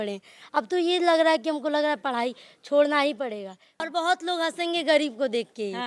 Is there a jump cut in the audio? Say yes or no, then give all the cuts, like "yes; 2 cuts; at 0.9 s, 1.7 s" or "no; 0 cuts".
yes; 1 cut; at 3.7 s